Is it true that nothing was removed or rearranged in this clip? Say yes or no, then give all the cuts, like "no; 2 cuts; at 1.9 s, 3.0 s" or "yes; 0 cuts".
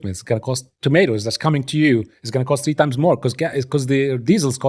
yes; 0 cuts